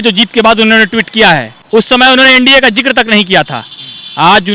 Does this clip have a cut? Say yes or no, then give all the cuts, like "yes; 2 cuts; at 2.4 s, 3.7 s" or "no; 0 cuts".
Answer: yes; 1 cut; at 1.5 s